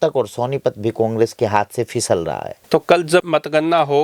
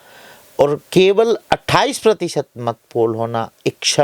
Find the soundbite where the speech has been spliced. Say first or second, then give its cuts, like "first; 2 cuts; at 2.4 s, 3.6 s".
first; 1 cut; at 2.5 s